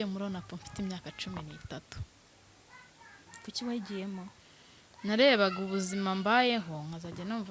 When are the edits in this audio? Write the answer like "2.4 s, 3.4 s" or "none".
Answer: none

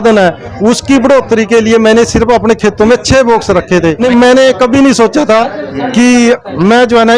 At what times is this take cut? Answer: none

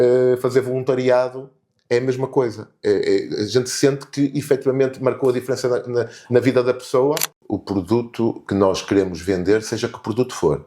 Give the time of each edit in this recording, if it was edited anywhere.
7.4 s

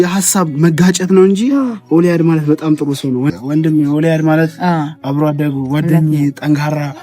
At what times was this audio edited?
3.3 s

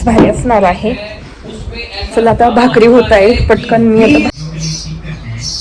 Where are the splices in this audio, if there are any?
4.3 s

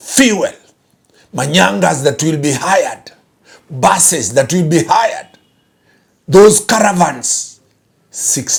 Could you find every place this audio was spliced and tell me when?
none

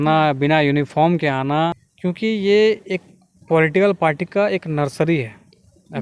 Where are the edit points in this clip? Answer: 1.9 s

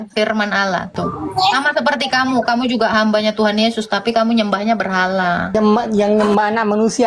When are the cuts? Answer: 0.9 s, 5.5 s

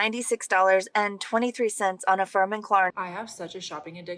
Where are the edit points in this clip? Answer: 2.9 s

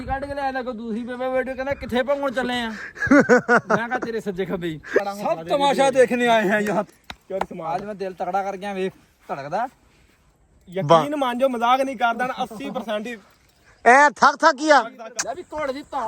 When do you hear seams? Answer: 5.0 s, 6.9 s, 15.0 s

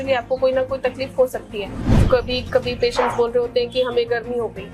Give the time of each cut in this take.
1.9 s

